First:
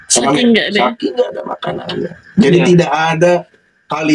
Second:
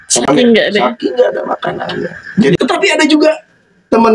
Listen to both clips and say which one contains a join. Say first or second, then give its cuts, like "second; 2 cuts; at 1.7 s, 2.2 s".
second; 1 cut; at 2.6 s